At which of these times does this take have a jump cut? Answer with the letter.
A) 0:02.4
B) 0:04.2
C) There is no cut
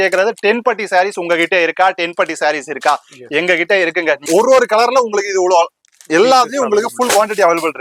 B